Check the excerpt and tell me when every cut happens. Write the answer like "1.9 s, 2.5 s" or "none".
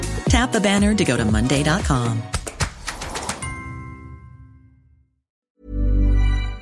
5.3 s